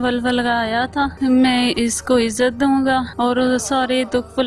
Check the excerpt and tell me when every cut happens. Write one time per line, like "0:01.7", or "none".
0:01.1
0:03.1